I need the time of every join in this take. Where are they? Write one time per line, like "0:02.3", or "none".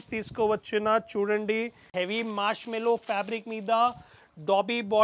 0:01.9